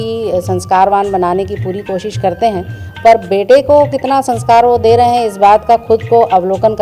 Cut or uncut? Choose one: uncut